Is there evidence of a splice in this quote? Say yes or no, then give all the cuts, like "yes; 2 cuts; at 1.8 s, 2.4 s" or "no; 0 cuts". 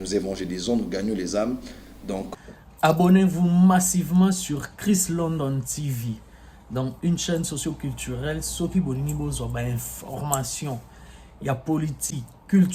yes; 1 cut; at 2.3 s